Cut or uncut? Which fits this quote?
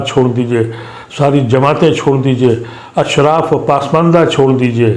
uncut